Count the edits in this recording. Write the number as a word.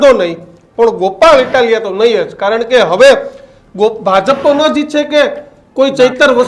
zero